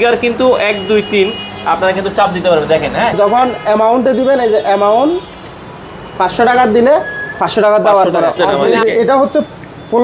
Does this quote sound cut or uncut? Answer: cut